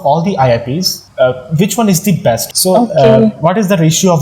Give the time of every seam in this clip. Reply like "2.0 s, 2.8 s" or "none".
1.0 s, 2.5 s